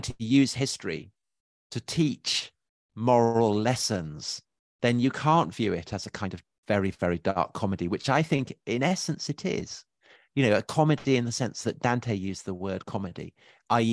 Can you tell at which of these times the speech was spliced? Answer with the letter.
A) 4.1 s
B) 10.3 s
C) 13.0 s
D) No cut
D